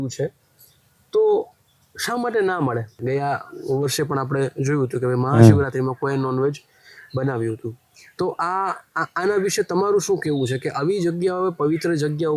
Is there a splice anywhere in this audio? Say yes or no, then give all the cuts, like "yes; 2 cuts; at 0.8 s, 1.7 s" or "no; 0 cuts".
yes; 1 cut; at 3.0 s